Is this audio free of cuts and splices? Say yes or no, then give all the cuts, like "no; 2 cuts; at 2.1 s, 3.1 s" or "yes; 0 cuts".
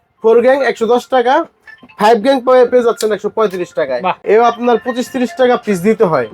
no; 1 cut; at 4.2 s